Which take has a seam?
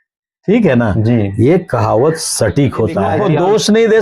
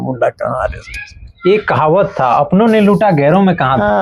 first; 1 cut; at 3.1 s

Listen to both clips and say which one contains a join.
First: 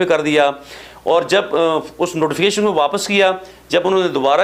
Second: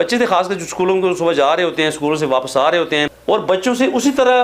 second; 1 cut; at 3.3 s

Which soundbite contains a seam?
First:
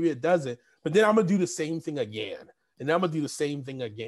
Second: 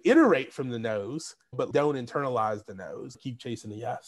second; 2 cuts; at 1.6 s, 3.2 s

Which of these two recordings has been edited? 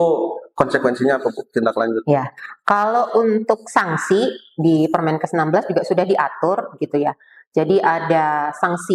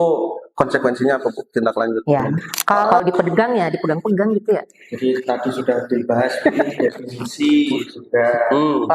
second; 1 cut; at 2.9 s

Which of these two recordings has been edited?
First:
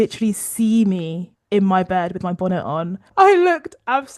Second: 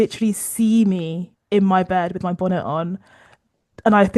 first; 1 cut; at 3.0 s

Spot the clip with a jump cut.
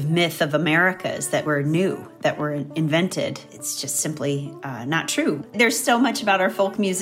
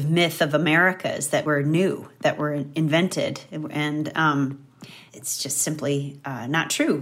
first; 2 cuts; at 3.5 s, 5.5 s

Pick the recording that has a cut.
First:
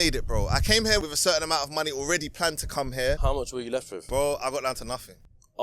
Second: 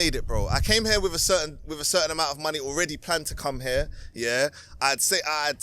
first; 2 cuts; at 1.0 s, 3.4 s

